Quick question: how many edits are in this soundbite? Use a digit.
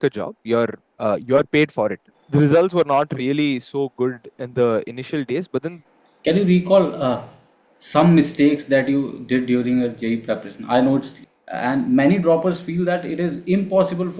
3